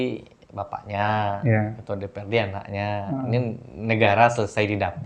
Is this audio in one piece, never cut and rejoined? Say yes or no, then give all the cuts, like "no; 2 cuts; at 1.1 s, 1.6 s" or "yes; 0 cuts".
yes; 0 cuts